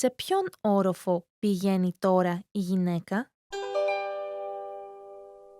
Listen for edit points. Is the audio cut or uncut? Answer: cut